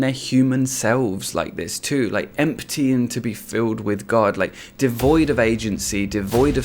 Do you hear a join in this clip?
yes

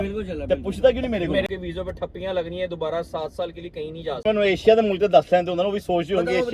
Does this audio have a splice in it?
yes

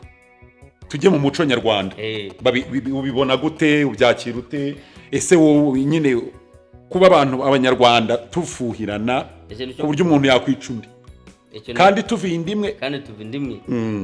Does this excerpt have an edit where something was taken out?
no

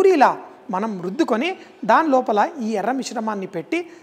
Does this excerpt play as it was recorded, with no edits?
yes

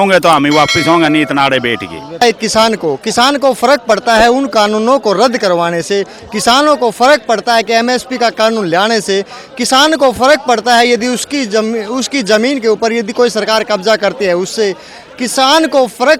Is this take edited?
yes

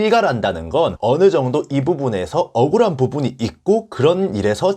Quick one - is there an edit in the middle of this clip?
yes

